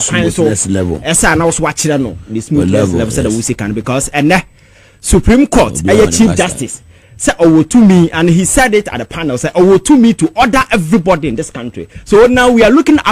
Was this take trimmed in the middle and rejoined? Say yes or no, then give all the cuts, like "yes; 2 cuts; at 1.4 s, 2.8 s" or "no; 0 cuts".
no; 0 cuts